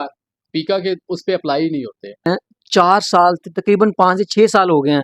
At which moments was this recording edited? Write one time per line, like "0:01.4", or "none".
0:02.3